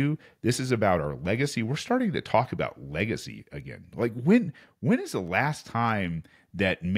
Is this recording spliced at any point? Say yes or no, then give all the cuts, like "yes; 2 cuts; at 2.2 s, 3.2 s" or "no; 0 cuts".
no; 0 cuts